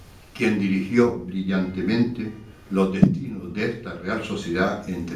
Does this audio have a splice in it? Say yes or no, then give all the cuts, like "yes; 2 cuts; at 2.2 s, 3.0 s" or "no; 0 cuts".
yes; 1 cut; at 1.8 s